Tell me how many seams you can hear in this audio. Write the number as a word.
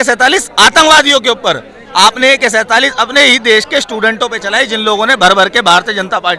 zero